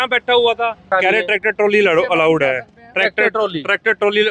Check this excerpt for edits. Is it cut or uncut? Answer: cut